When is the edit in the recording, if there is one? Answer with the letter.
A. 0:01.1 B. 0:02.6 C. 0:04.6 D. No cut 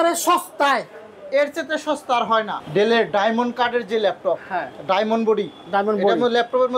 B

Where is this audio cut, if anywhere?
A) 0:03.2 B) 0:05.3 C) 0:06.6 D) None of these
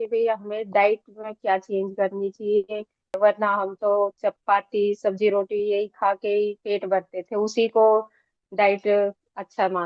A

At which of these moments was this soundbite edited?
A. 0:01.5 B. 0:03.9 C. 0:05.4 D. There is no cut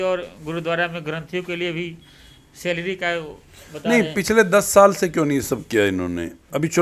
D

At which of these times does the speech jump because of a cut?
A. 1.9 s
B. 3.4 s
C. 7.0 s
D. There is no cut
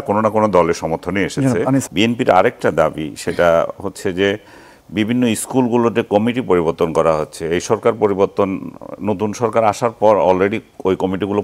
A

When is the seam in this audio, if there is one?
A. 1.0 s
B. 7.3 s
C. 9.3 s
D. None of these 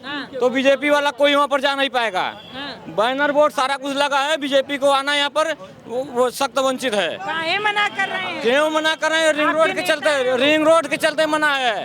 D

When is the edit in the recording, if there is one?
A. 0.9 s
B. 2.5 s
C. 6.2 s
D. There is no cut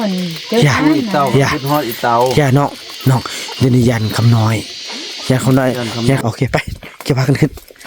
C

